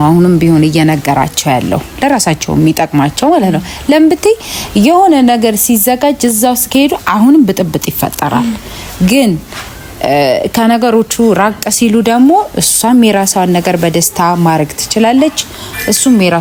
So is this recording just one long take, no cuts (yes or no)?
yes